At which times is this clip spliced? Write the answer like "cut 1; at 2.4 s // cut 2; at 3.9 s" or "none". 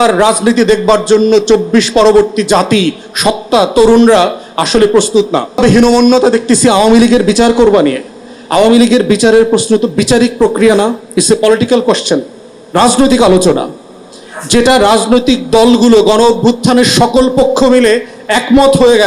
cut 1; at 5.6 s